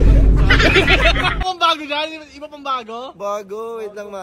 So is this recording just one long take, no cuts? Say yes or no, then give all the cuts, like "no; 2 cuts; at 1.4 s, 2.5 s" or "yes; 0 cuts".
no; 1 cut; at 1.4 s